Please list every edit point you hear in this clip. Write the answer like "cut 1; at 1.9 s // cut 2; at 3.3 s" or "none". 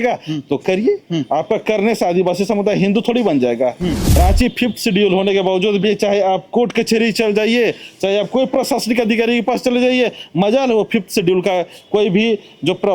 cut 1; at 4.0 s